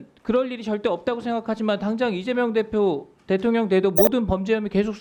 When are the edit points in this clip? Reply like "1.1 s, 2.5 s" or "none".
none

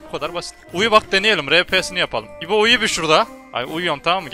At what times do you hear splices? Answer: 3.4 s

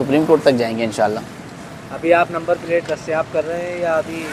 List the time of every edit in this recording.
none

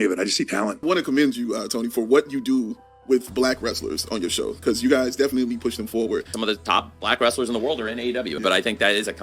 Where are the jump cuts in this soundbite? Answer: 0.8 s, 6.3 s, 8.4 s

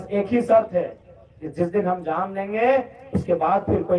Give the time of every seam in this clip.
none

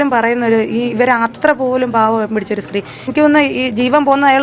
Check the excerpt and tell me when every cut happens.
3.1 s

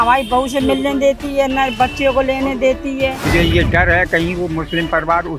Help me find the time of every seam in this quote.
3.2 s

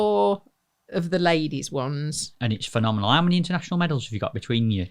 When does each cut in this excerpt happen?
2.3 s

